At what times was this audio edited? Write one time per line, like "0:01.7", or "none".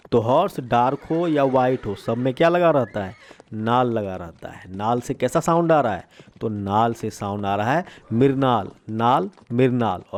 none